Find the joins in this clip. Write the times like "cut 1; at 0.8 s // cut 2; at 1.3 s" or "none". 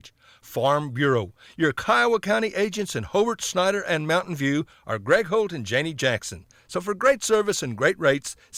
none